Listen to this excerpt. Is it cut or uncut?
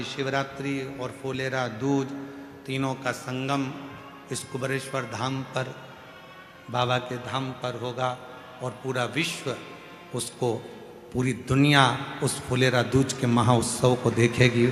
uncut